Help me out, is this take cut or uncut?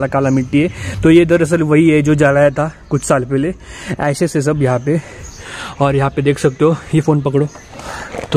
uncut